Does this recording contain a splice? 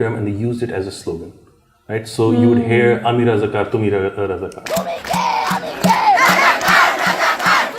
no; 0 cuts

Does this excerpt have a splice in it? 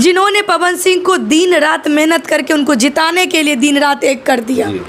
no; 0 cuts

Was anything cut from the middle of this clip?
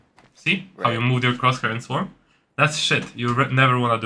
no; 0 cuts

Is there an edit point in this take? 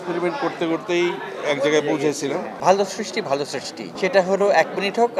yes; 1 cut; at 2.6 s

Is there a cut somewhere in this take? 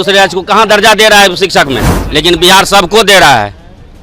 yes; 1 cut; at 1.9 s

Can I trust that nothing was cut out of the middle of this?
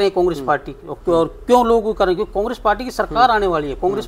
yes; 0 cuts

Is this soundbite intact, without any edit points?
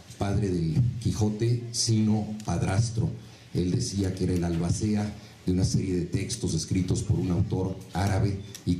yes; 0 cuts

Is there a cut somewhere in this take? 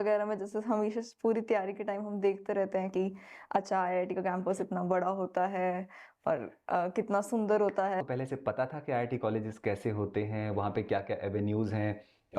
yes; 1 cut; at 8.0 s

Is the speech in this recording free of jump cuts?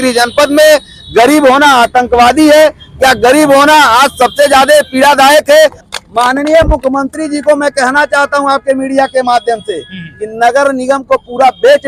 no; 1 cut; at 5.7 s

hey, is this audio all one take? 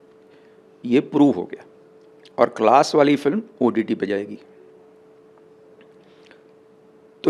yes; 0 cuts

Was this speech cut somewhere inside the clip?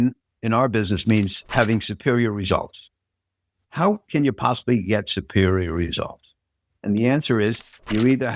no; 0 cuts

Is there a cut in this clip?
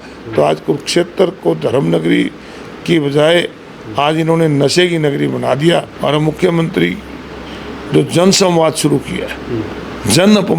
yes; 1 cut; at 5.9 s

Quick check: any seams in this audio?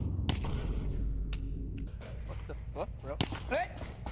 yes; 1 cut; at 1.9 s

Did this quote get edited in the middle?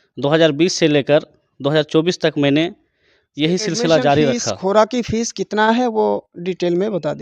yes; 1 cut; at 4.5 s

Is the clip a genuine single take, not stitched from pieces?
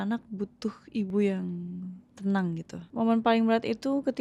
no; 2 cuts; at 1.1 s, 2.8 s

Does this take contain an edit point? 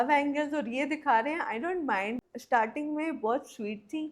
yes; 1 cut; at 2.1 s

